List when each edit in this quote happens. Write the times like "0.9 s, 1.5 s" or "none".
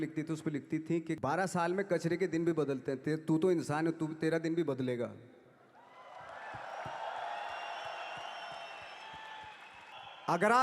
1.2 s, 9.9 s